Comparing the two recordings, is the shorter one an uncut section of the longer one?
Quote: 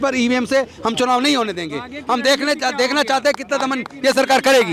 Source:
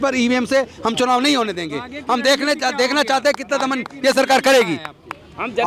yes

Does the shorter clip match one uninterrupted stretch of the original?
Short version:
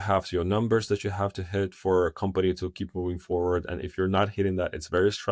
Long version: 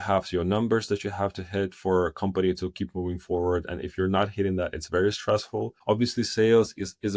yes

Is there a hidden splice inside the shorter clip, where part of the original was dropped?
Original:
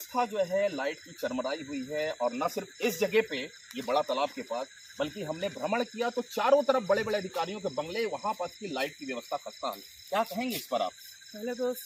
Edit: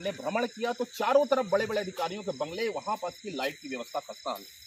no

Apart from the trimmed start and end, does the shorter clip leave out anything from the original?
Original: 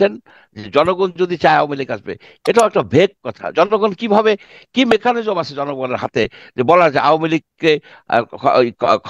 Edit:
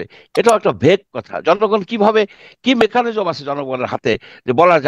no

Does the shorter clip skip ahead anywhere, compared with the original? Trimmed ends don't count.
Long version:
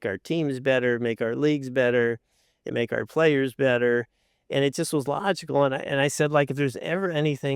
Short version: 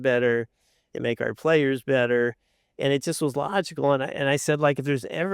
no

